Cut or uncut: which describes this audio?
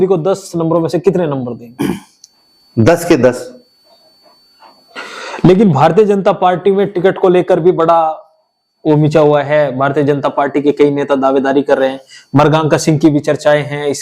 uncut